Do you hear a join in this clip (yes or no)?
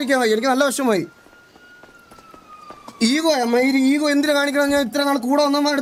no